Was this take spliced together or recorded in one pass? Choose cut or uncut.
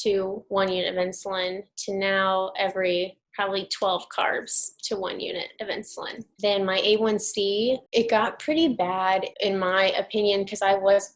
cut